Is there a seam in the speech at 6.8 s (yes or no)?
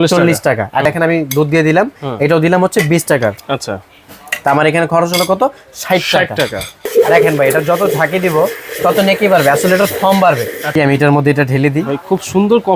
yes